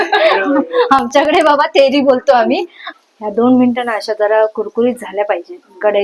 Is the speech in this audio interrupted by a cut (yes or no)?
yes